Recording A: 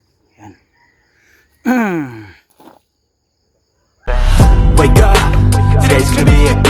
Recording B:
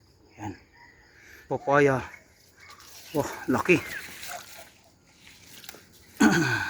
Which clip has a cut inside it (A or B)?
B